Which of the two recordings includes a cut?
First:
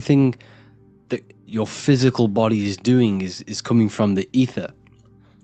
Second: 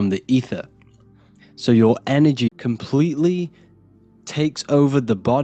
second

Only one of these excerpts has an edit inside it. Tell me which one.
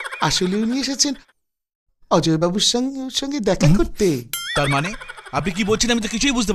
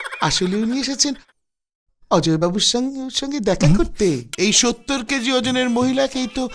second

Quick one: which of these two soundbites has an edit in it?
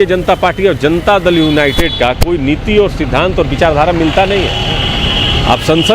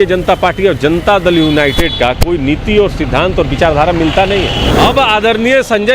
second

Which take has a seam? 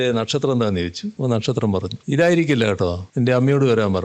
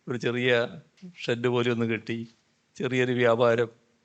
first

